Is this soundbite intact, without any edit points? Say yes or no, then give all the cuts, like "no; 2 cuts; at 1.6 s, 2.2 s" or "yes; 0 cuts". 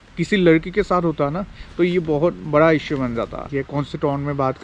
no; 1 cut; at 3.4 s